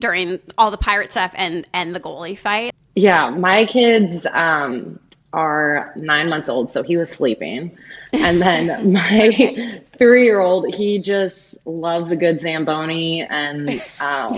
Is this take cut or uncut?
cut